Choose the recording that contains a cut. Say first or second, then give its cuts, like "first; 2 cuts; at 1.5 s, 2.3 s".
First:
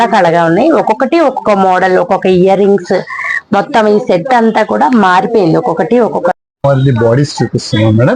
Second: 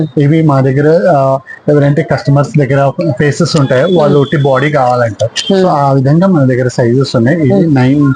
first; 1 cut; at 6.5 s